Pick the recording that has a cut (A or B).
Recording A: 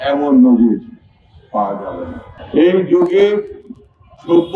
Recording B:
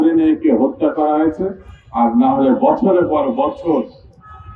A